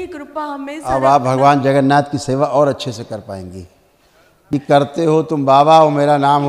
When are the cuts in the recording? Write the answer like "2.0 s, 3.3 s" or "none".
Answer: 4.3 s